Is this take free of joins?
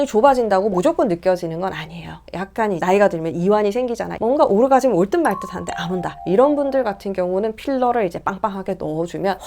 no; 2 cuts; at 2.3 s, 4.1 s

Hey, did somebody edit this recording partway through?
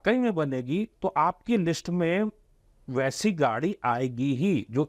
no; 0 cuts

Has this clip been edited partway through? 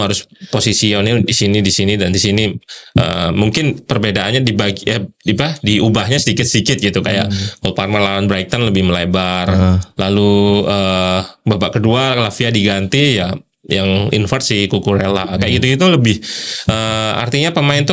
no; 0 cuts

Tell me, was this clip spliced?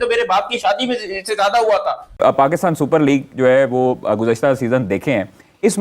yes; 1 cut; at 2.1 s

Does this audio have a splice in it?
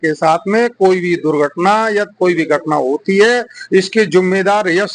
no; 0 cuts

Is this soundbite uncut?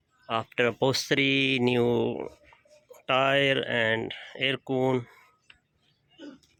yes; 0 cuts

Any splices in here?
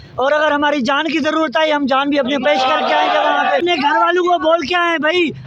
yes; 1 cut; at 3.6 s

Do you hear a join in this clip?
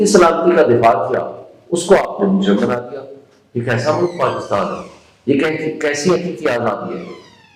no; 0 cuts

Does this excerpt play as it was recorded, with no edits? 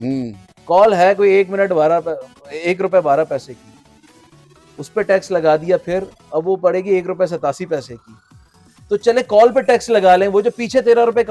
yes; 0 cuts

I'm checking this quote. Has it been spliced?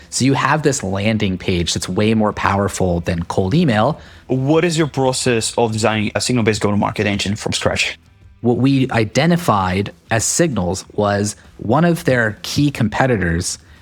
yes; 3 cuts; at 4.2 s, 6.2 s, 8.4 s

